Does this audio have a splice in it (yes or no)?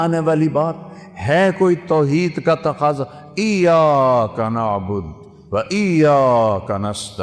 no